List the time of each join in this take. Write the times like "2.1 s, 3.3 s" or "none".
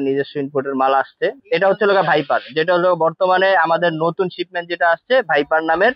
1.4 s